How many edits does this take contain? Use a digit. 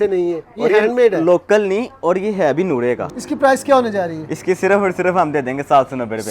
1